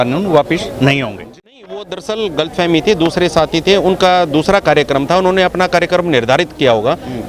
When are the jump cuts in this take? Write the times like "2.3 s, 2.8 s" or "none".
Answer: 1.2 s